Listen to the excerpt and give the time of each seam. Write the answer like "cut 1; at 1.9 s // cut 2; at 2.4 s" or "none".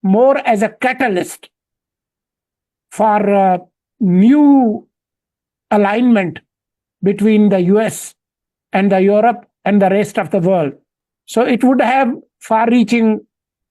none

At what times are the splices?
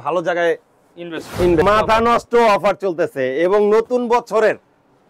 cut 1; at 1.6 s

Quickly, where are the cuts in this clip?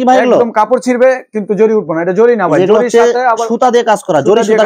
none

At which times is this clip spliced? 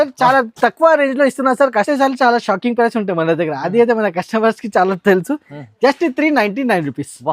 cut 1; at 1.9 s

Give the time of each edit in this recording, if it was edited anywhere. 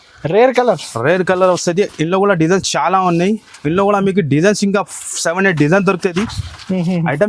none

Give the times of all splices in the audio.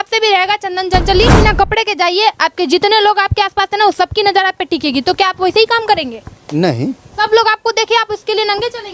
cut 1; at 1.4 s

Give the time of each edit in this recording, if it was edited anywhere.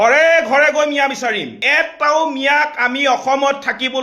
cut 1; at 1.6 s

